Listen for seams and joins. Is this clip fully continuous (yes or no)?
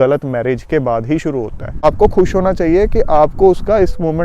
no